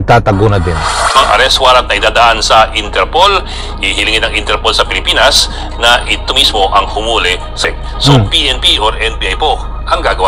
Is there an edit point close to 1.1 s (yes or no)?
yes